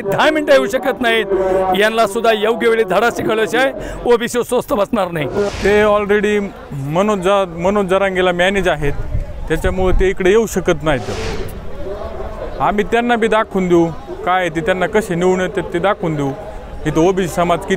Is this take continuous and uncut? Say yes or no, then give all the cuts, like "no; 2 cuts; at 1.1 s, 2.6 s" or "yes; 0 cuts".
no; 1 cut; at 5.5 s